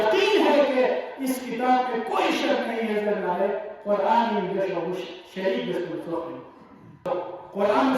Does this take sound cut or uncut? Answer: cut